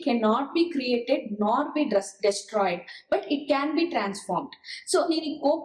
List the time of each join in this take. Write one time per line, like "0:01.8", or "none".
none